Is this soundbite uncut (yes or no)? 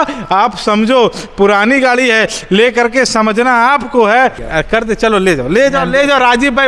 no